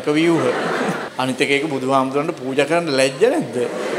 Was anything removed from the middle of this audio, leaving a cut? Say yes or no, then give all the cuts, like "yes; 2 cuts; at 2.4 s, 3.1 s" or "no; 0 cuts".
yes; 1 cut; at 1.1 s